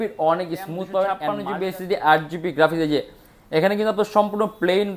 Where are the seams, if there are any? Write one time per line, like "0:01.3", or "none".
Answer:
0:01.3